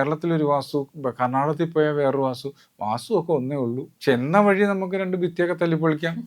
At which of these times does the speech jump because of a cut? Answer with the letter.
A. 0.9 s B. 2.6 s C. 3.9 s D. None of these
C